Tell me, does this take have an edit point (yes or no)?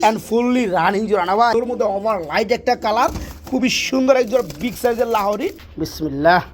yes